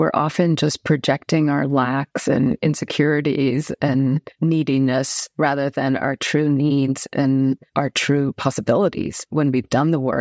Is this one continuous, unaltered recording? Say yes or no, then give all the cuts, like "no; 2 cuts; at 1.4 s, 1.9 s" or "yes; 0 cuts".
no; 3 cuts; at 4.3 s, 7.7 s, 9.3 s